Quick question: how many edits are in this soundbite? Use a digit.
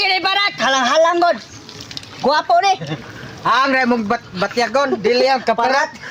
0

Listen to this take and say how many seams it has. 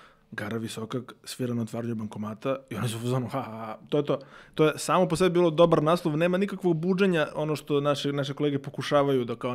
0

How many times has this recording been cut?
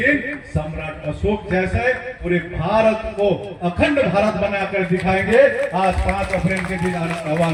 0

